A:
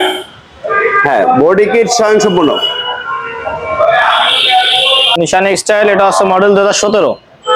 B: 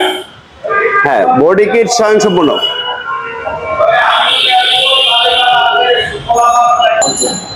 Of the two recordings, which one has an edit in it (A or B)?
A